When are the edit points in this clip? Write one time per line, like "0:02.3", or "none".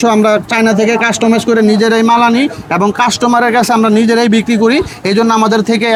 none